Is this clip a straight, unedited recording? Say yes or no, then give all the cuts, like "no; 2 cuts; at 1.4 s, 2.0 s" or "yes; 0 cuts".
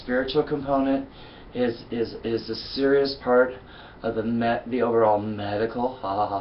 yes; 0 cuts